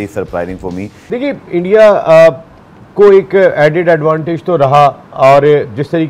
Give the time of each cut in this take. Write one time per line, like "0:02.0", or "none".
0:01.0